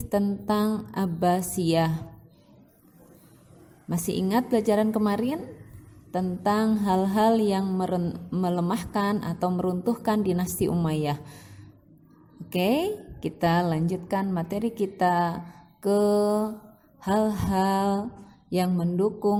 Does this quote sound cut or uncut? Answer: uncut